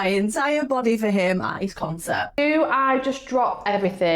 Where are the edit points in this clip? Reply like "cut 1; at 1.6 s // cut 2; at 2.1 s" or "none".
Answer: cut 1; at 2.4 s